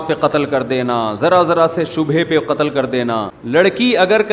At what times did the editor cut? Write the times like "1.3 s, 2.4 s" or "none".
3.4 s

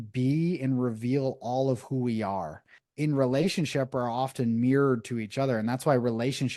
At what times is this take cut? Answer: 2.8 s

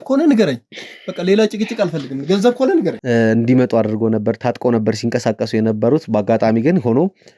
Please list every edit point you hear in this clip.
3.0 s

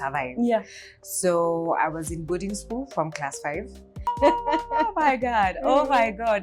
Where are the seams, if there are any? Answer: 4.1 s

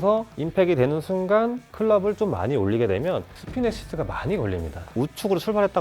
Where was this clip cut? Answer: 4.9 s

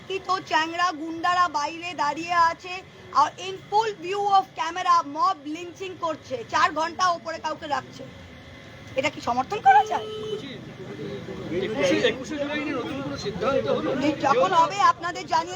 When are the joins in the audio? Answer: 5.7 s

